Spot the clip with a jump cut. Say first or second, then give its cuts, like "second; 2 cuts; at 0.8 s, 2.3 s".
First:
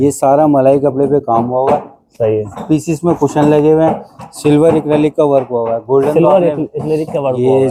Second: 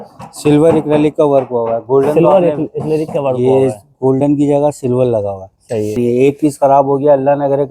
second; 1 cut; at 6.0 s